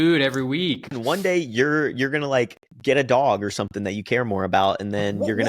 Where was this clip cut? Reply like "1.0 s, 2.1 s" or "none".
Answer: 0.9 s, 2.7 s